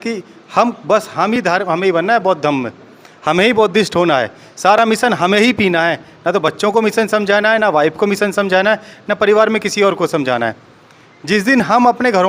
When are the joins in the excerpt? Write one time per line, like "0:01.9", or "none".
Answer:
none